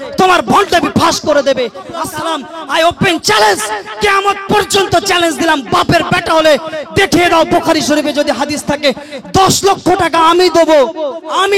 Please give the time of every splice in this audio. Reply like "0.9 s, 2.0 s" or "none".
2.0 s